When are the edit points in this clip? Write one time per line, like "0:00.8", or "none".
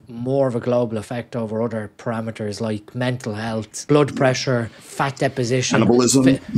0:03.7
0:04.8